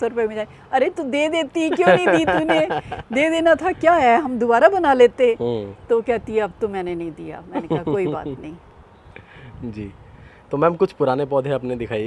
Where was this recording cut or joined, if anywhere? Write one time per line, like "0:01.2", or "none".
none